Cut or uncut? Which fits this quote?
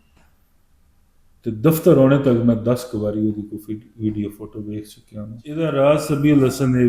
cut